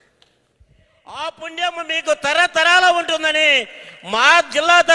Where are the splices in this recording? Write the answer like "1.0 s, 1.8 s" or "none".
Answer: 1.2 s